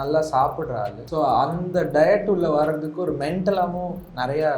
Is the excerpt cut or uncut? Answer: cut